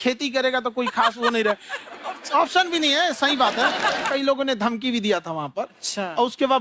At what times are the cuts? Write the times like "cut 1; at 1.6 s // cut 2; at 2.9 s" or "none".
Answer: cut 1; at 4.1 s